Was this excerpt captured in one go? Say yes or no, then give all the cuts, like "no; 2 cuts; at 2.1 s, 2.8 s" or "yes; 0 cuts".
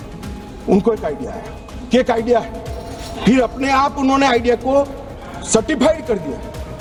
yes; 0 cuts